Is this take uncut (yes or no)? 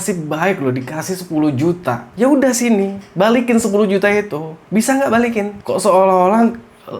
no